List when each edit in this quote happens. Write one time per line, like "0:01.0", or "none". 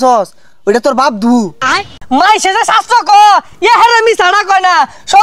0:01.8

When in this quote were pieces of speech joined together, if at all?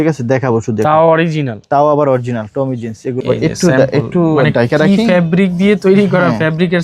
0:03.1

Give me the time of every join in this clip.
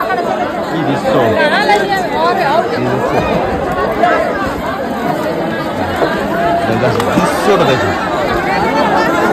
none

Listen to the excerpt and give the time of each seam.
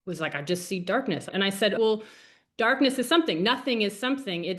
0:01.2

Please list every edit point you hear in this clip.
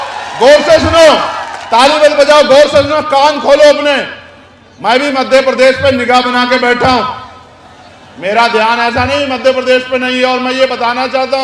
none

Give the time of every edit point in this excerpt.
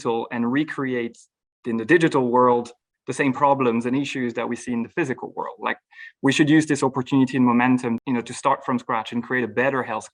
none

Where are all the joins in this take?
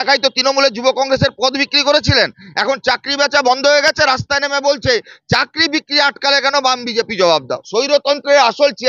0:07.4

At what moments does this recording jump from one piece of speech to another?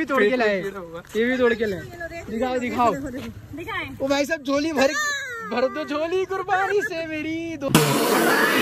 0:07.6

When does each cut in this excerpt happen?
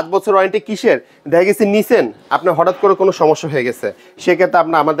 none

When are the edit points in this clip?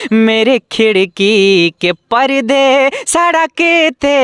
none

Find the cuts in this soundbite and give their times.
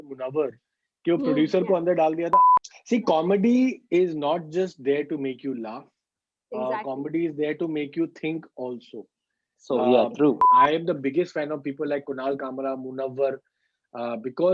0:02.4
0:10.5

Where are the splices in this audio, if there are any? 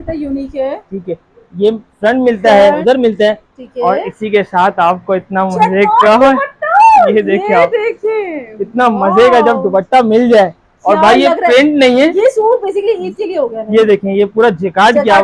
0:02.8

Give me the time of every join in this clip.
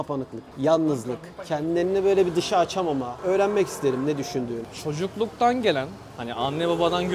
none

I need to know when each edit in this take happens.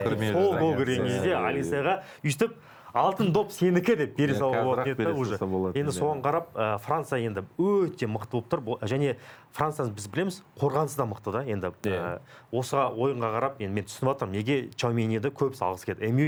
none

